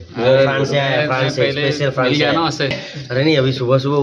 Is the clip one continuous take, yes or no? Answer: no